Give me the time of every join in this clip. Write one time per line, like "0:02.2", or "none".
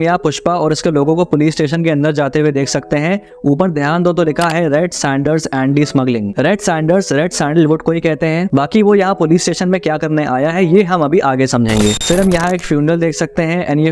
0:08.5
0:12.0